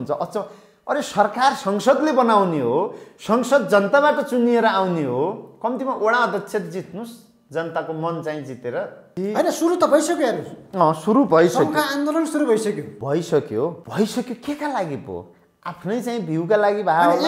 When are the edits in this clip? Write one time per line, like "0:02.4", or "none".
0:09.1
0:12.9
0:13.8